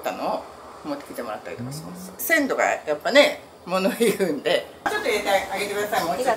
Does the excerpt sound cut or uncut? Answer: cut